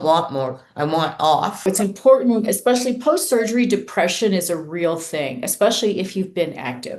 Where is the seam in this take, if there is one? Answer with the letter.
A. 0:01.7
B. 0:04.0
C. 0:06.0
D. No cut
A